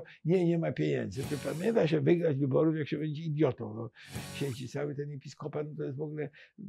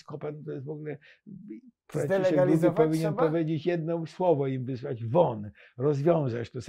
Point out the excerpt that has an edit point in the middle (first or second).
first